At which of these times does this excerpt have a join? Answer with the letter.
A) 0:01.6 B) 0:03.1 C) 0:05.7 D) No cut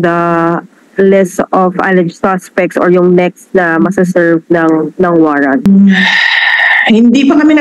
C